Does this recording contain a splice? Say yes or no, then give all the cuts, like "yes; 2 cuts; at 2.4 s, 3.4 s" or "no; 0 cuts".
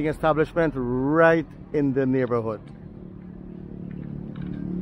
no; 0 cuts